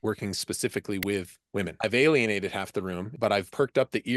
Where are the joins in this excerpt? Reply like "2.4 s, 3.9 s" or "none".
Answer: 1.7 s, 3.4 s